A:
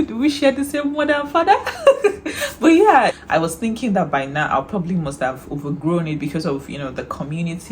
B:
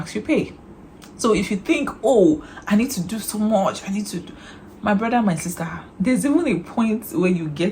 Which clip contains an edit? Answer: A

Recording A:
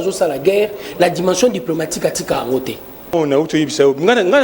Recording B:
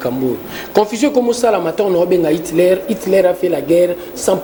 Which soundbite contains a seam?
A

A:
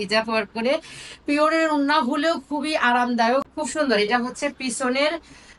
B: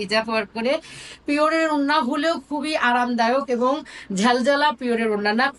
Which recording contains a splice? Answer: A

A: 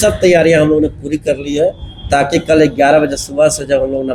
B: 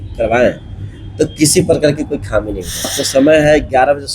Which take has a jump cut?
B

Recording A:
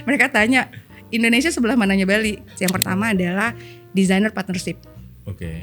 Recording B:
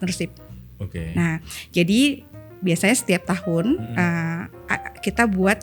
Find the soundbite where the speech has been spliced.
A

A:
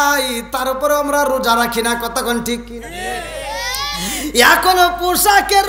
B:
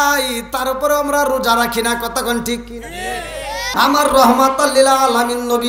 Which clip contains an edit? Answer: B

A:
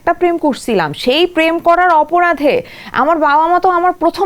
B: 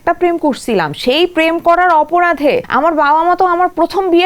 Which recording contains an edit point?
B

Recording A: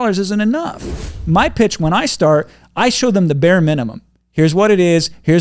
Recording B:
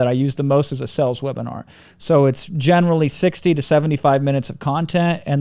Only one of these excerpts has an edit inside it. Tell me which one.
A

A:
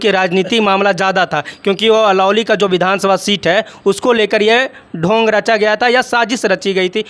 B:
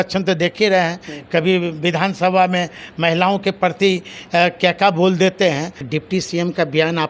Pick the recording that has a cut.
B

